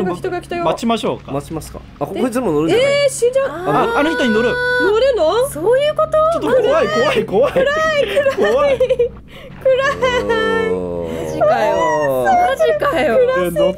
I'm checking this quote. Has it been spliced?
no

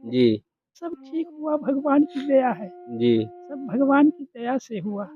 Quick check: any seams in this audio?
yes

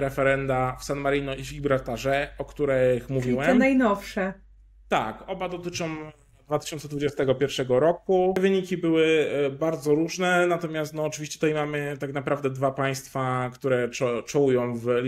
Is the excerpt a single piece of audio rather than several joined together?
no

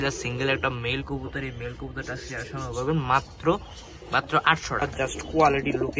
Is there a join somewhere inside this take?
yes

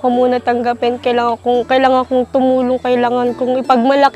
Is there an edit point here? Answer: no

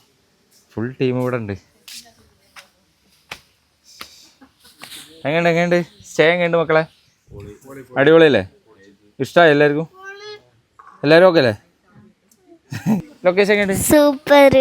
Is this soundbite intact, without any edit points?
no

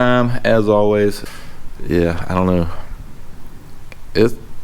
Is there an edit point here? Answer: yes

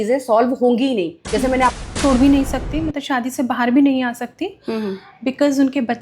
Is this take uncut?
no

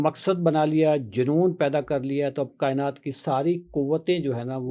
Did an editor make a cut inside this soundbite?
no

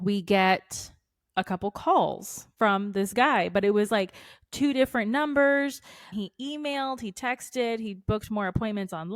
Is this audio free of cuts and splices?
yes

